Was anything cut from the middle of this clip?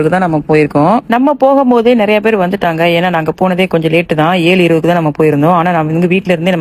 no; 0 cuts

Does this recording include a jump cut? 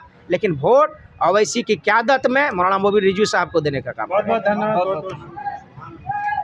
no; 0 cuts

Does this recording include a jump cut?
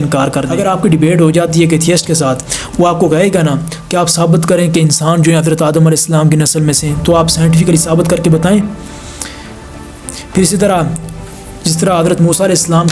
yes; 1 cut; at 0.9 s

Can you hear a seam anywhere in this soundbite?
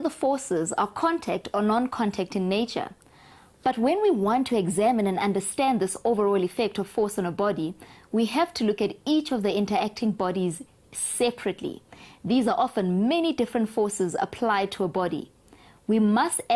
yes; 1 cut; at 14.9 s

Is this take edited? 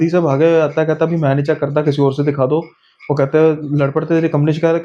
no; 0 cuts

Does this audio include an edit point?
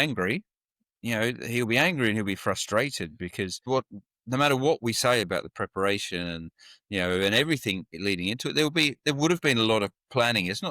yes; 1 cut; at 3.6 s

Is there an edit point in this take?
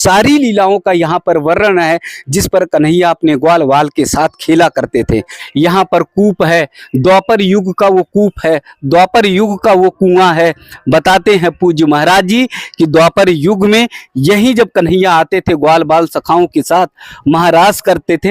yes; 1 cut; at 5.4 s

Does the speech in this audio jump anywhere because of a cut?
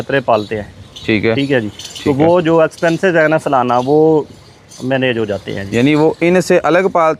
no; 0 cuts

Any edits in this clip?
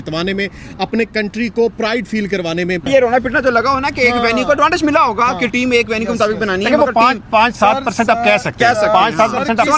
yes; 1 cut; at 2.9 s

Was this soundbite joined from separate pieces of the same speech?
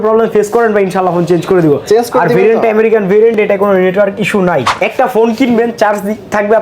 yes; 1 cut; at 4.7 s

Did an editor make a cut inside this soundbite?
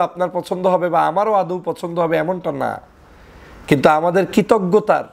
no; 0 cuts

